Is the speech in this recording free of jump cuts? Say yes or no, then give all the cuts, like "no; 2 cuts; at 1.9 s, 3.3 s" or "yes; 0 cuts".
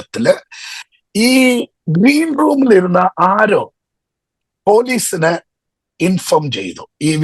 yes; 0 cuts